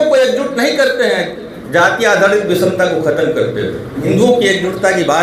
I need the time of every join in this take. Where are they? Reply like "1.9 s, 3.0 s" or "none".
4.0 s